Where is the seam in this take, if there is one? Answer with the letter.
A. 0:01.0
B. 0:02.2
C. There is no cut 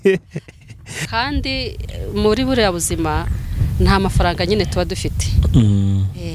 A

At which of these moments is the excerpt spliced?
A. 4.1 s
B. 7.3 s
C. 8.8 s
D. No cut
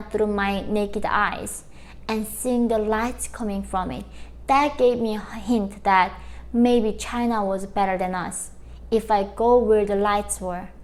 D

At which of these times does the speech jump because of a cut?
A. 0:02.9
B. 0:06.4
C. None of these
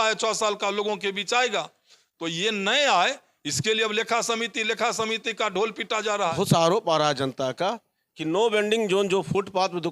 B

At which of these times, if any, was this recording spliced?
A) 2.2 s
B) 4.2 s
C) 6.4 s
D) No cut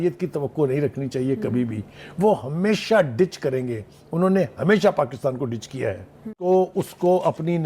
C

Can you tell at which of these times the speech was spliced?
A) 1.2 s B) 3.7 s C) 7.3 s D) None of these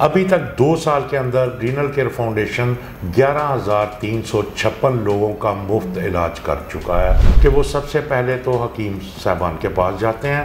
C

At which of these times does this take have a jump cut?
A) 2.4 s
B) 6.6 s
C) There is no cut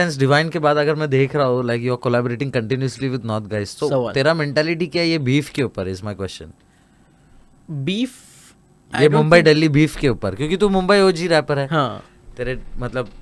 C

